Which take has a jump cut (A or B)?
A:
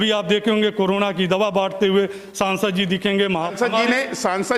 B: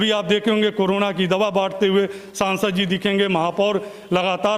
A